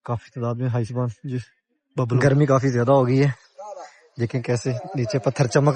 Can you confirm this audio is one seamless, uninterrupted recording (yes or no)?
no